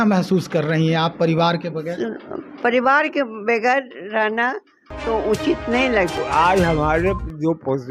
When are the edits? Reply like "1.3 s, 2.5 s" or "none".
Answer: 6.1 s